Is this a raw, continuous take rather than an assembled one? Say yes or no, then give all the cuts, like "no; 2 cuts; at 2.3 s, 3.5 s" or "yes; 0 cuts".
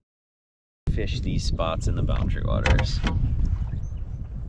yes; 0 cuts